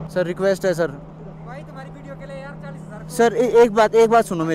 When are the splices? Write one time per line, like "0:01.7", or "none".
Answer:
none